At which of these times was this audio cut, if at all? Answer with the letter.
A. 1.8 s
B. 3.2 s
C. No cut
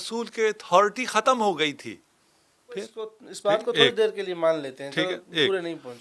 B